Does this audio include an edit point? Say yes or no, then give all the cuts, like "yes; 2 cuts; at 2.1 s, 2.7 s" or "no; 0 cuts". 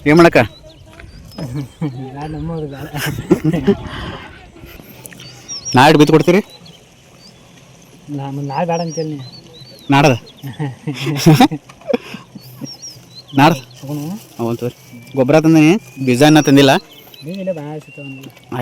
no; 0 cuts